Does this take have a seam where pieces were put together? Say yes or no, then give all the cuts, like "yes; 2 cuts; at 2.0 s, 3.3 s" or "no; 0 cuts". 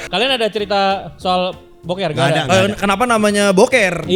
no; 0 cuts